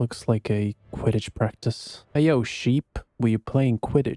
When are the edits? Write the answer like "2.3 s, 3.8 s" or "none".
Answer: none